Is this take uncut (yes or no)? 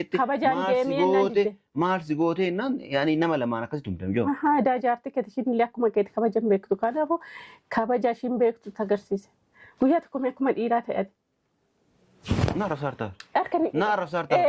no